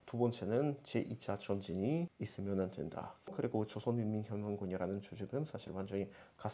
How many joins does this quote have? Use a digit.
1